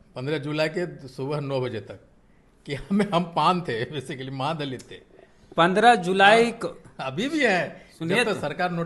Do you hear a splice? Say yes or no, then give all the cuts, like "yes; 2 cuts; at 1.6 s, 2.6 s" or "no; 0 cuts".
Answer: no; 0 cuts